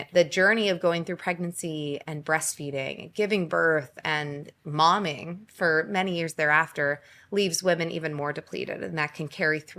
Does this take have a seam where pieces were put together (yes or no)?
no